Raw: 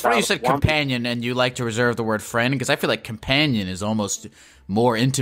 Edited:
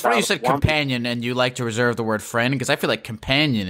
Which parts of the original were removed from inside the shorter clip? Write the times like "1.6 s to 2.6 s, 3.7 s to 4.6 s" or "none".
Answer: none